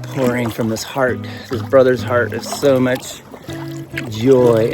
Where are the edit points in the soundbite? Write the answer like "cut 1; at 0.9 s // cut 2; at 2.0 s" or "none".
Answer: none